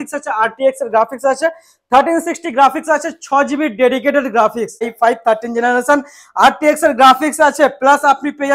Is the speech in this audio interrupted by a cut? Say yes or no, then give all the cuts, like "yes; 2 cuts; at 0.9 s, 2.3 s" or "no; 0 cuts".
yes; 1 cut; at 4.9 s